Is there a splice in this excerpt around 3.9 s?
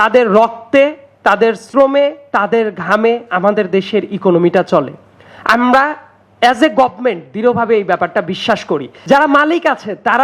no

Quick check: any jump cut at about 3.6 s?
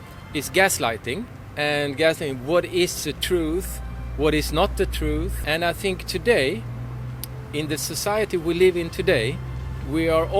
no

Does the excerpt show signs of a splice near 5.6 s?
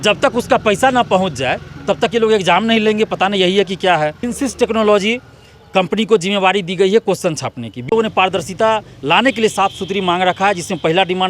no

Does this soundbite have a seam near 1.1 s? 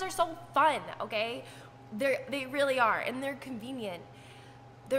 no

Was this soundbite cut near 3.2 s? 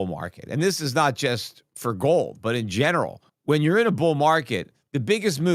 yes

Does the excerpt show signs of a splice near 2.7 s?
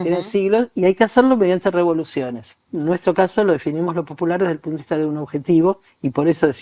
yes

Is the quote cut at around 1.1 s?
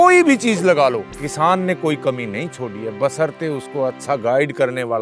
yes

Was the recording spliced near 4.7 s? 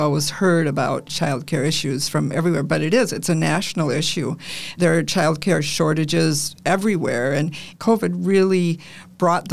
yes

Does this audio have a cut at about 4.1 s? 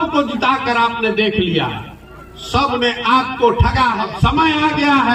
yes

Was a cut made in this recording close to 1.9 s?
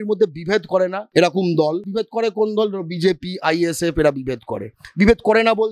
yes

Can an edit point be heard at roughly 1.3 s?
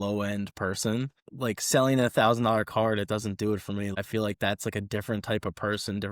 yes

